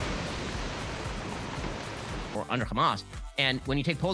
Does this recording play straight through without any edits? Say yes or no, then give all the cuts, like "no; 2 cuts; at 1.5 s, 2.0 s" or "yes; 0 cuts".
yes; 0 cuts